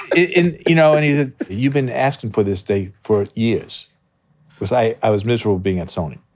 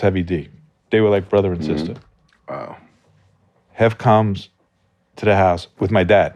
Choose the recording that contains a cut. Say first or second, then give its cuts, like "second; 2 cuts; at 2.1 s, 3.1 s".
first; 1 cut; at 1.6 s